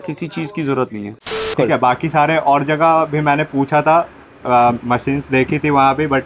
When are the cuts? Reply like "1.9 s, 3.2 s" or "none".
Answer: 1.5 s

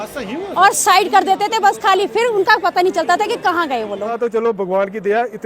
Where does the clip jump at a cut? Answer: 4.1 s

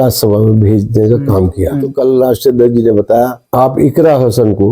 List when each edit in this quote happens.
1.9 s, 3.4 s

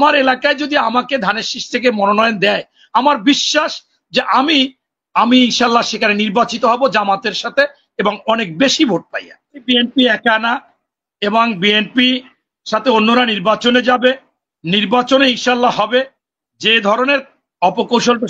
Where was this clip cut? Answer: 9.6 s

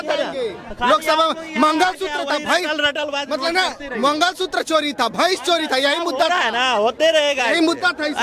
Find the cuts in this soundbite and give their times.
none

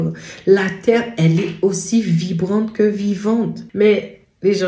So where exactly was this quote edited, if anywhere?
3.6 s

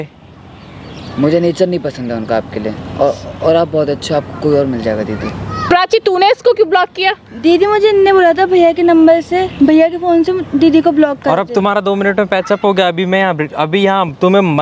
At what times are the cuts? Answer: 5.6 s

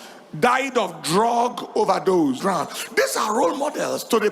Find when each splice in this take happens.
2.4 s

